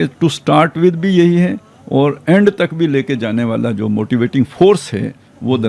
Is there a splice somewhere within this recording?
no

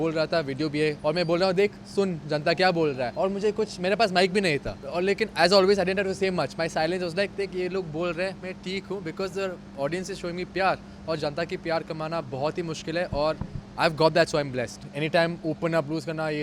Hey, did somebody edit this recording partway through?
yes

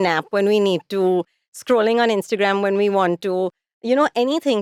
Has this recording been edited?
no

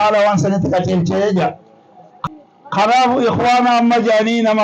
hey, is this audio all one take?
no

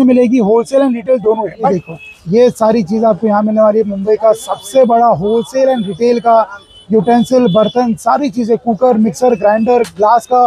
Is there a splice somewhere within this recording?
yes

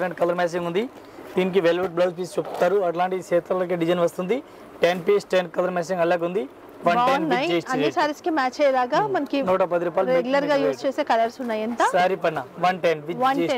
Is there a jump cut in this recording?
no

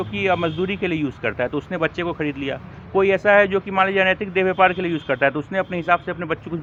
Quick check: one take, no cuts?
yes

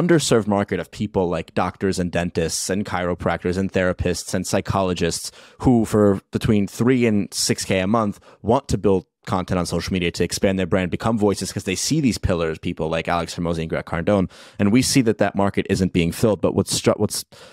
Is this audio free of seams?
yes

